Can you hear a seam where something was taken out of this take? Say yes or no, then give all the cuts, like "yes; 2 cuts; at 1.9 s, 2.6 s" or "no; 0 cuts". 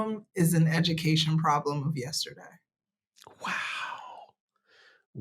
no; 0 cuts